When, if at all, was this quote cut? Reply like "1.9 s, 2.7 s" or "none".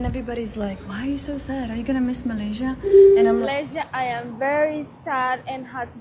3.5 s